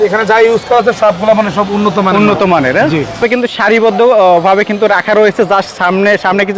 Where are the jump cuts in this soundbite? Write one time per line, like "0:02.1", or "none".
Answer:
0:03.2